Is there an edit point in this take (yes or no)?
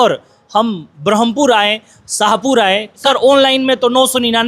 yes